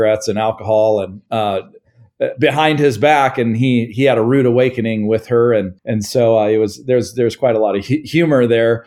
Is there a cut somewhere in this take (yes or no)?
no